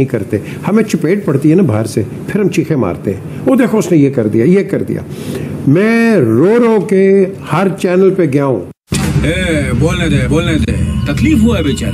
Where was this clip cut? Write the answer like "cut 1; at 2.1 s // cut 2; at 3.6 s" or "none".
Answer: none